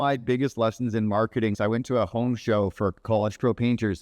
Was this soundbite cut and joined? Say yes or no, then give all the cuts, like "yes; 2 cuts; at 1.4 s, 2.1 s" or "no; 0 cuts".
yes; 2 cuts; at 1.5 s, 3.0 s